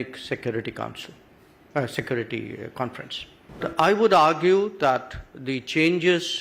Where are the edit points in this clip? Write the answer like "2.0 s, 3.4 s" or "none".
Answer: 3.6 s